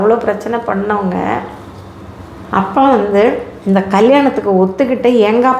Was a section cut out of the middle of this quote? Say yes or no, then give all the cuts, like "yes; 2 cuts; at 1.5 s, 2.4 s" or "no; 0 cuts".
no; 0 cuts